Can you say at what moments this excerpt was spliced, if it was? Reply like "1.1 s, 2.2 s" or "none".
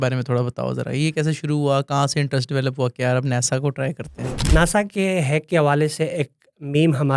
4.5 s